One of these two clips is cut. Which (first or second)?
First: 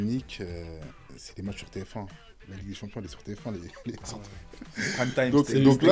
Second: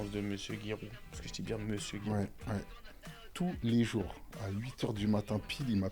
second